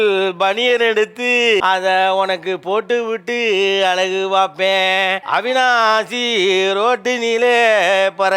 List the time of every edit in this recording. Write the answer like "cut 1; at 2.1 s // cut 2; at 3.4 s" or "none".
none